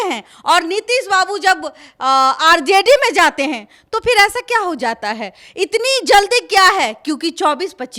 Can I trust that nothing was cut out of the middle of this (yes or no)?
yes